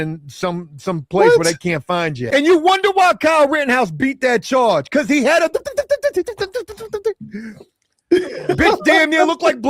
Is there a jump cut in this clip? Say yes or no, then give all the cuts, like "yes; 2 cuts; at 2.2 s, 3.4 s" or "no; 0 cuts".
yes; 1 cut; at 2.2 s